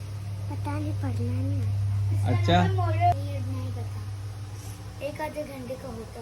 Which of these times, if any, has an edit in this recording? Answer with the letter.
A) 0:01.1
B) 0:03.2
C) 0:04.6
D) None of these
B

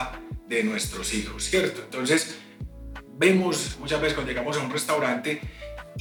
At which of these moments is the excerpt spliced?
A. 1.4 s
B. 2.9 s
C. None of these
C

